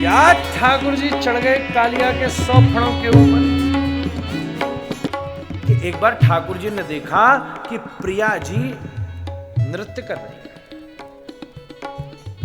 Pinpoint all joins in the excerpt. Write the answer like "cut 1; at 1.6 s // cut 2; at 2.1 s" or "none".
cut 1; at 5.1 s